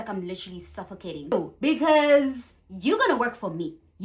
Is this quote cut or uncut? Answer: cut